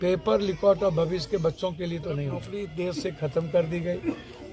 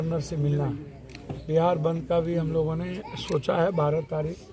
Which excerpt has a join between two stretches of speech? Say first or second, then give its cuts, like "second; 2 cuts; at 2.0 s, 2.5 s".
first; 1 cut; at 2.6 s